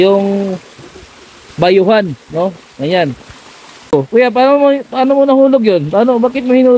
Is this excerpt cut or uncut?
cut